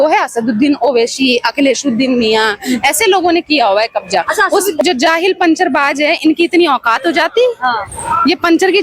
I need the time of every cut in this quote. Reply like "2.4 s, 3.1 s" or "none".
4.8 s